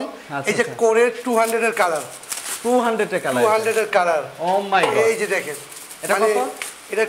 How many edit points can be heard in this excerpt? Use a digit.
0